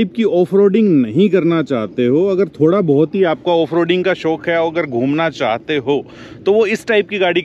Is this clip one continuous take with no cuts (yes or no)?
yes